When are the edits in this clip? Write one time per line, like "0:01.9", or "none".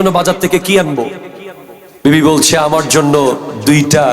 0:02.1